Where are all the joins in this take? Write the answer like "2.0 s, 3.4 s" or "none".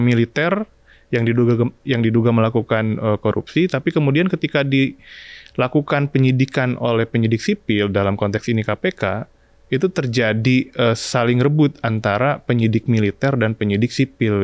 none